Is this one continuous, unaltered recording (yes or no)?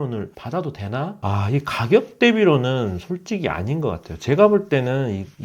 no